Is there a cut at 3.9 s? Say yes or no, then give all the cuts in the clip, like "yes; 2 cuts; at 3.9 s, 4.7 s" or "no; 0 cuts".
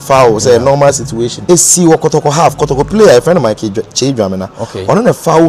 no; 1 cut; at 1.3 s